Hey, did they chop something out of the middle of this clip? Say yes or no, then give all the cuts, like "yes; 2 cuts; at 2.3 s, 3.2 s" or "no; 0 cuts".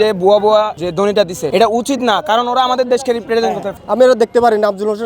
yes; 2 cuts; at 1.0 s, 3.7 s